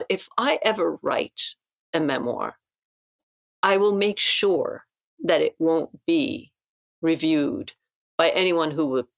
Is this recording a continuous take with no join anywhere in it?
yes; 0 cuts

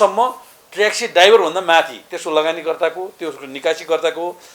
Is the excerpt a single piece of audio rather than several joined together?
yes; 0 cuts

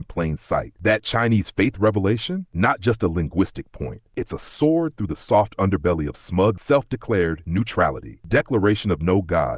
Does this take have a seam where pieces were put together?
yes; 1 cut; at 6.6 s

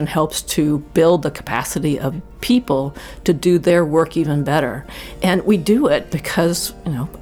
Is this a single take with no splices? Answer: no; 1 cut; at 2.1 s

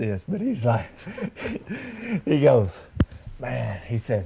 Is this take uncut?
yes; 0 cuts

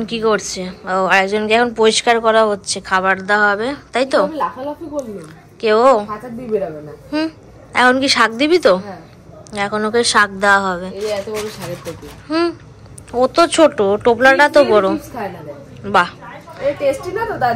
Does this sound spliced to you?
no; 0 cuts

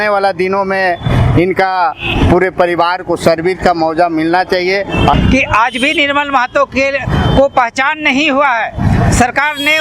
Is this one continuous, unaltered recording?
no; 1 cut; at 5.1 s

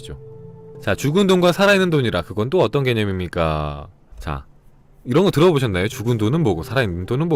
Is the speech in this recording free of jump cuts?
no; 1 cut; at 5.9 s

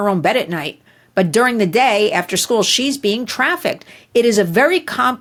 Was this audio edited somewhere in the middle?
no; 0 cuts

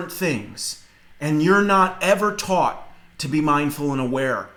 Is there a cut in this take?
no; 0 cuts

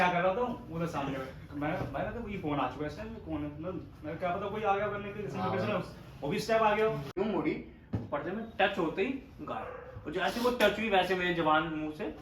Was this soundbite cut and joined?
yes; 1 cut; at 7.1 s

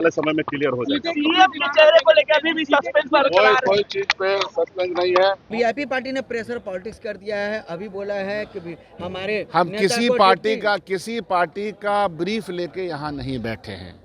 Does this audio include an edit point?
yes; 1 cut; at 5.5 s

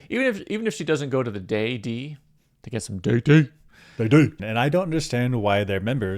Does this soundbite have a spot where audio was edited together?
yes; 1 cut; at 4.4 s

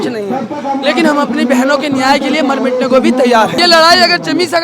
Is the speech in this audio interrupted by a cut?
yes; 1 cut; at 3.6 s

